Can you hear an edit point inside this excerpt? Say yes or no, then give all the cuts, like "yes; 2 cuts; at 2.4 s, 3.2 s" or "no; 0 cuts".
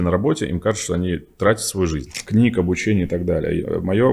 yes; 1 cut; at 2.1 s